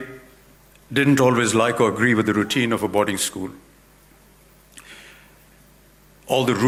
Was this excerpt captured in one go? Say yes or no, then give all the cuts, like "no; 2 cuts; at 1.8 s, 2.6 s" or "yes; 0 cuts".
yes; 0 cuts